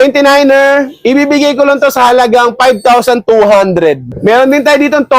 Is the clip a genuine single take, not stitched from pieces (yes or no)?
no